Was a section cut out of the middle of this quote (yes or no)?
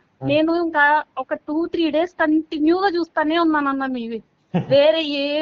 no